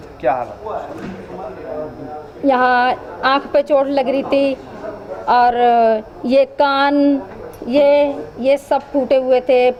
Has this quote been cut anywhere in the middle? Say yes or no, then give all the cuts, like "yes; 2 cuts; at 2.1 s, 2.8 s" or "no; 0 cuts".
no; 0 cuts